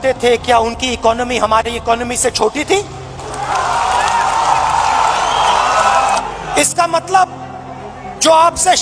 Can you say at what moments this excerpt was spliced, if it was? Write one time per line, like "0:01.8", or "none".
none